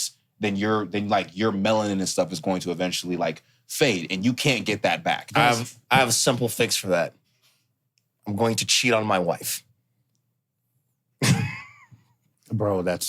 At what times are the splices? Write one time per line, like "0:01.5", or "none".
0:05.2